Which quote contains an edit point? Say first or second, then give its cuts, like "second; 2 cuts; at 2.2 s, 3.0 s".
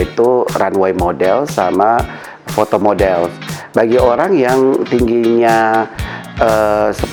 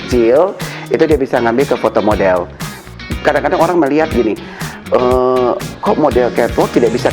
second; 1 cut; at 2.7 s